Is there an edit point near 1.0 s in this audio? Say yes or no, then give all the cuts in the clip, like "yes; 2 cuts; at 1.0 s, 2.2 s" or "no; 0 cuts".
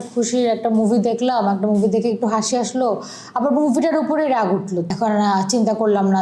no; 1 cut; at 4.9 s